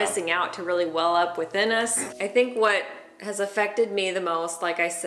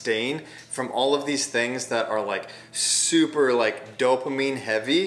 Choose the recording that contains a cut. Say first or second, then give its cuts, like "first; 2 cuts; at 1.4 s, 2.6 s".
first; 1 cut; at 2.0 s